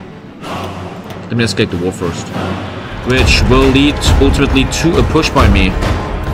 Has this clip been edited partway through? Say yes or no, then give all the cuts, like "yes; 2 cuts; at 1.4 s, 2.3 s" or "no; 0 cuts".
yes; 1 cut; at 2.9 s